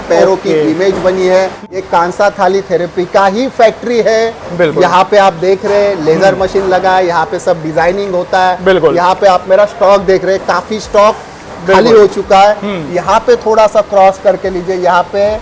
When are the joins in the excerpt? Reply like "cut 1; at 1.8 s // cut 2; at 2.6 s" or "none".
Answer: cut 1; at 1.6 s